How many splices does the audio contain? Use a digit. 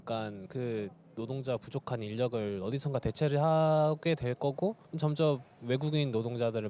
0